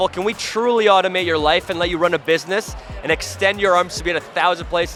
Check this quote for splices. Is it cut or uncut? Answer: uncut